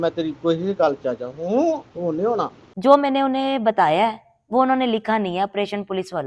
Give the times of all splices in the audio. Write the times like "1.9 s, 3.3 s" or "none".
2.6 s